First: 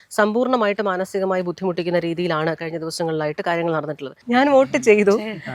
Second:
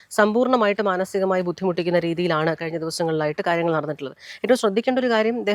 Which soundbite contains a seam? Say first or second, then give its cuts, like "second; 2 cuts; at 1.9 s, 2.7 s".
first; 1 cut; at 4.2 s